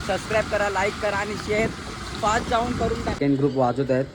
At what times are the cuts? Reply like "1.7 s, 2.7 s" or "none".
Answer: 3.2 s